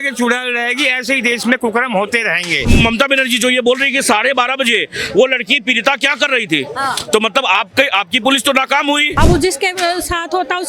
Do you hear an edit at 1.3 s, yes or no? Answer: no